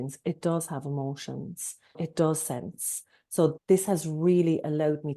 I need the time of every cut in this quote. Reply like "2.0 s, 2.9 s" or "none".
3.6 s